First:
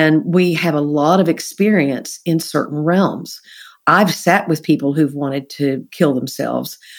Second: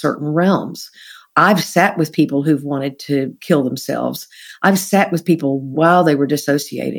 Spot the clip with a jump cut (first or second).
second